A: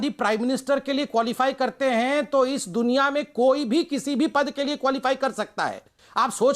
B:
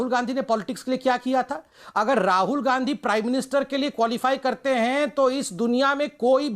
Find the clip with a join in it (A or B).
A